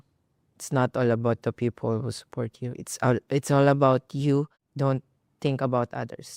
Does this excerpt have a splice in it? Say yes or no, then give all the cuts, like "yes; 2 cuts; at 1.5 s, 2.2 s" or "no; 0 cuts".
yes; 1 cut; at 4.6 s